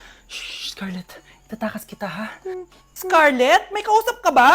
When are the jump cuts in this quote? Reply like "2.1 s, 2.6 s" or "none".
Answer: 3.1 s